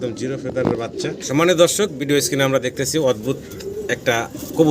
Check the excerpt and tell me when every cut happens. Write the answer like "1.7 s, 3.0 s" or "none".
1.2 s